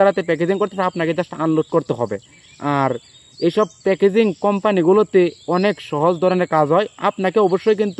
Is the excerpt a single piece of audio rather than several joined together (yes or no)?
yes